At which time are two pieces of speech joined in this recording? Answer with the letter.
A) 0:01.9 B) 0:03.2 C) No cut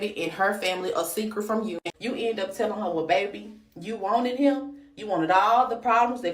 A